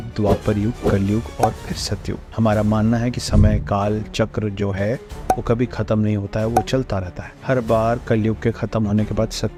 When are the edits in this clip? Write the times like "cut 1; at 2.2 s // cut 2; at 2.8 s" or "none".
none